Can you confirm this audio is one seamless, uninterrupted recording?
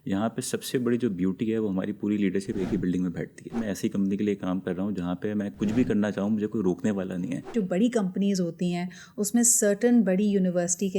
no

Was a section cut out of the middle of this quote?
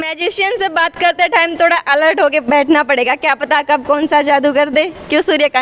no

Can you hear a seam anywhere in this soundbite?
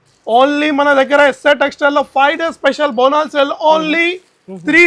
no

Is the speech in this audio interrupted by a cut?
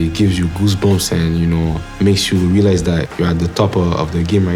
yes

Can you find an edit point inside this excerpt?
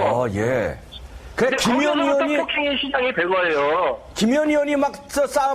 yes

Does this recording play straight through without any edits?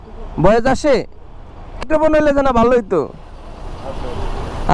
no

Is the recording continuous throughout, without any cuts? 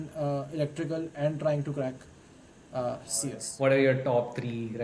no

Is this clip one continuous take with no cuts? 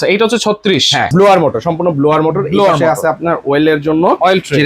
no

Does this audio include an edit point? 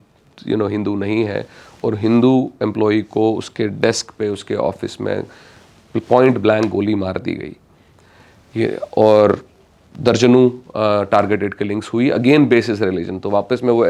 no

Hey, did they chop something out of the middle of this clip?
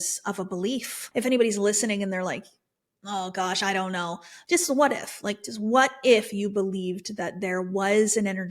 yes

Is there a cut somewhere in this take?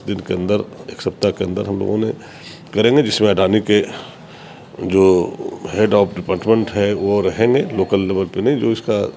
no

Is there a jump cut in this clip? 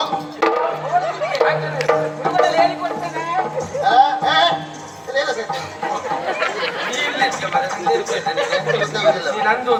no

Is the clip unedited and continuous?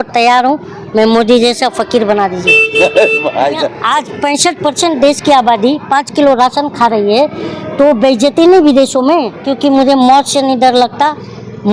no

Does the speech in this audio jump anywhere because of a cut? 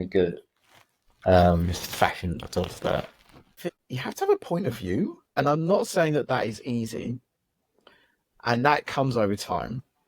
yes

